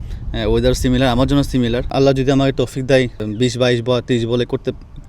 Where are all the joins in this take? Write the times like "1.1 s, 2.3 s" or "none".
1.9 s, 3.2 s